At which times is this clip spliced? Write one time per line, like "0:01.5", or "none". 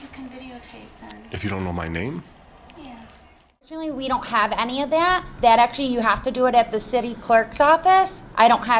0:03.6